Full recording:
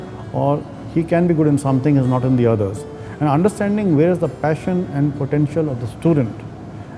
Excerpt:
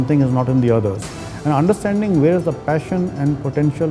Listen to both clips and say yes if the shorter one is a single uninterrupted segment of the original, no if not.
yes